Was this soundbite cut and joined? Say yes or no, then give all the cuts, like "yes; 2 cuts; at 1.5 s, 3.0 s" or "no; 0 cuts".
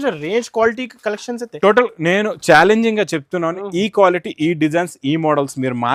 no; 0 cuts